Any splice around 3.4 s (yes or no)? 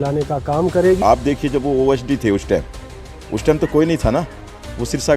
no